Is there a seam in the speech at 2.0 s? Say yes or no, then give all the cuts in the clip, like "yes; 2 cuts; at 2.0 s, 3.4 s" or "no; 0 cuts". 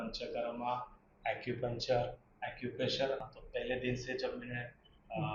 no; 1 cut; at 3.4 s